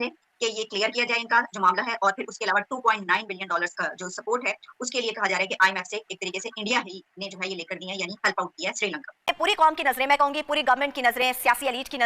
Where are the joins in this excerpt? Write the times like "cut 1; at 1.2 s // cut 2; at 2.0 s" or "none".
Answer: cut 1; at 9.3 s

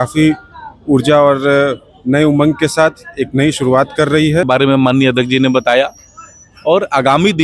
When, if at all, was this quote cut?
cut 1; at 4.5 s

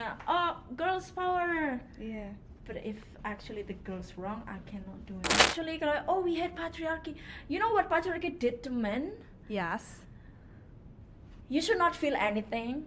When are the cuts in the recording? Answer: cut 1; at 5.5 s

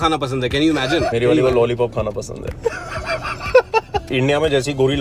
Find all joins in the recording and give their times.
cut 1; at 1.1 s // cut 2; at 4.0 s

